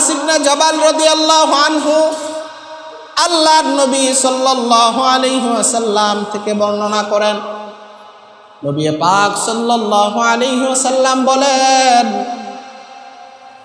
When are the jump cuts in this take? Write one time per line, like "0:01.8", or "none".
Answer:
none